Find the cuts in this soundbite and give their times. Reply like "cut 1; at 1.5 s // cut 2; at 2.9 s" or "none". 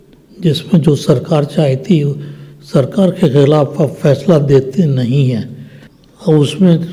none